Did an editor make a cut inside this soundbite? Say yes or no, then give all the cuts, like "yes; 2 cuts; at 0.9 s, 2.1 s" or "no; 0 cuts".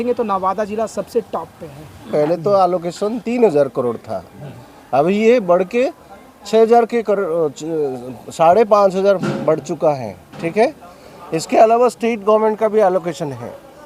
yes; 1 cut; at 2.0 s